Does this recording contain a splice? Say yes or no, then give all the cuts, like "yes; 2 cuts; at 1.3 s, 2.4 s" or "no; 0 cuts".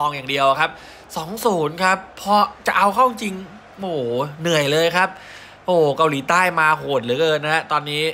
no; 0 cuts